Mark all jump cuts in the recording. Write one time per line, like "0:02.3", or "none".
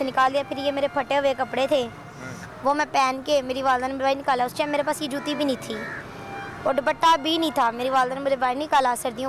none